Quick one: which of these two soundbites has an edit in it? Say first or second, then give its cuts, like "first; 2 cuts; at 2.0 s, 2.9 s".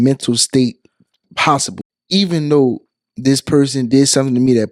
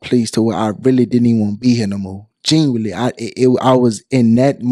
first; 1 cut; at 1.8 s